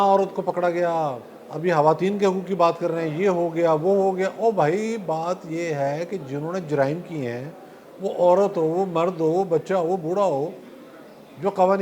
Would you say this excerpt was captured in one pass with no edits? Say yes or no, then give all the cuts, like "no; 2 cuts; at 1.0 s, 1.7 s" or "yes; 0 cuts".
yes; 0 cuts